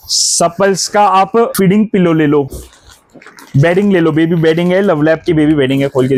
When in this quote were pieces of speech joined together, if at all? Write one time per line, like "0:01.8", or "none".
none